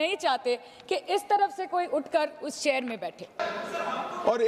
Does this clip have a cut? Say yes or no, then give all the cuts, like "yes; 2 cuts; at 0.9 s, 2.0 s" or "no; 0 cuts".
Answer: yes; 1 cut; at 3.4 s